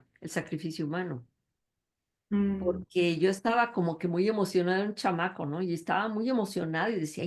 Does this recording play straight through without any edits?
yes; 0 cuts

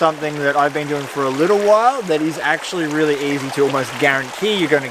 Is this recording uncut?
yes; 0 cuts

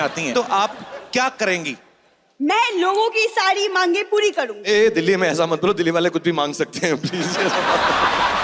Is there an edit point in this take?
no; 0 cuts

